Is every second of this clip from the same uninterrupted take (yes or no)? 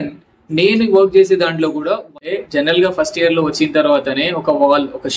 no